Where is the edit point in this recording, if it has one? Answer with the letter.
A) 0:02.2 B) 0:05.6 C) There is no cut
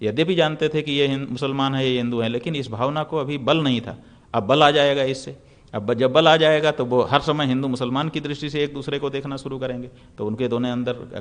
C